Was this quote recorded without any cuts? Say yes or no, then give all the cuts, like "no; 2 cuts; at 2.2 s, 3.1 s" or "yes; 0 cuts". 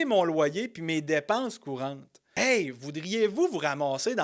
no; 1 cut; at 2.3 s